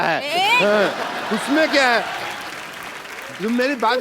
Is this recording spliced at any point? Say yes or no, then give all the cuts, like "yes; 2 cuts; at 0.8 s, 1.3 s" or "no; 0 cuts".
no; 0 cuts